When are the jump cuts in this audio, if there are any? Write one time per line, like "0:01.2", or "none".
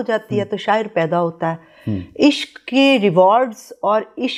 none